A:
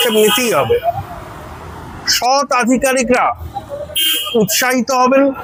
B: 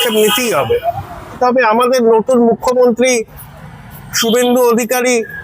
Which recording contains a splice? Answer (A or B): B